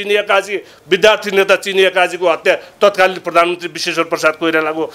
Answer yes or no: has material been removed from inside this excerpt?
no